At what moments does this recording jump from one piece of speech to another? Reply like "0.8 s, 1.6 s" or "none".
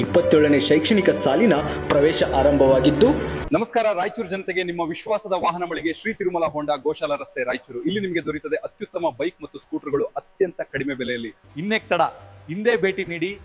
3.4 s, 11.4 s